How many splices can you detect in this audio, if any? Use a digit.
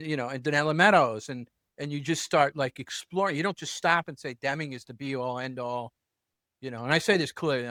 0